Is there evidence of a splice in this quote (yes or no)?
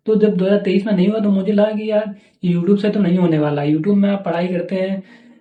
no